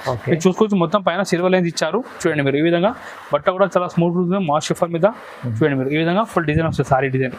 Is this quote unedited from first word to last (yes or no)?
yes